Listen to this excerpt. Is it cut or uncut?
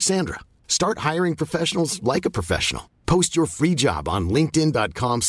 uncut